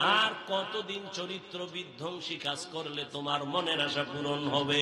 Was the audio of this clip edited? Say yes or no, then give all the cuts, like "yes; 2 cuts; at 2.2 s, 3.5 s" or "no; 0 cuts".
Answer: no; 0 cuts